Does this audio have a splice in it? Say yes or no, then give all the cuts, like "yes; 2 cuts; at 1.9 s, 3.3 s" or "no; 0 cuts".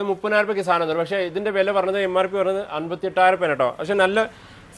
no; 0 cuts